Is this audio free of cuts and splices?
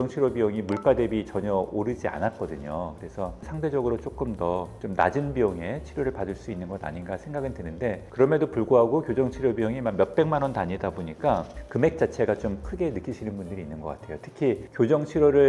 yes; 0 cuts

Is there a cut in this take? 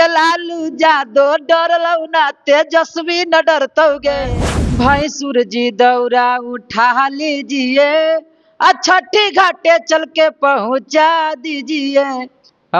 yes; 1 cut; at 4.3 s

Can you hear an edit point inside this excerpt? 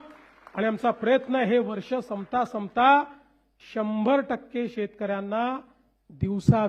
no; 0 cuts

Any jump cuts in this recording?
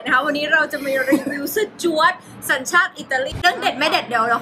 yes; 1 cut; at 3.4 s

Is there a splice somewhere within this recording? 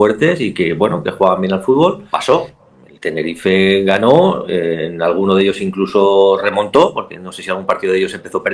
yes; 1 cut; at 2.1 s

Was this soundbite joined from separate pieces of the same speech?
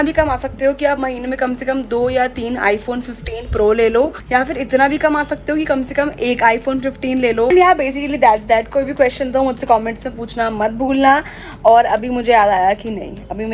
no; 0 cuts

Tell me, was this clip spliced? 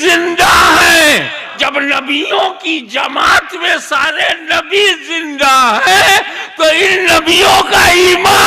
yes; 1 cut; at 1.6 s

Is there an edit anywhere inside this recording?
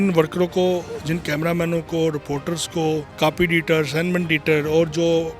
yes; 1 cut; at 3.1 s

